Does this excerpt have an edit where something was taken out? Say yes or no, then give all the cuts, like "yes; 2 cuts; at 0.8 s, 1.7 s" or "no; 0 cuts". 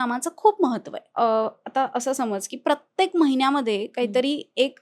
yes; 1 cut; at 1.0 s